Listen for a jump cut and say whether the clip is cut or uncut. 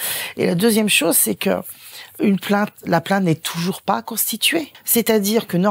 cut